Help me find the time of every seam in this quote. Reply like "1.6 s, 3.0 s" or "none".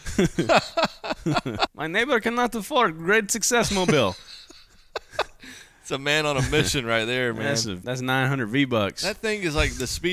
1.8 s, 7.8 s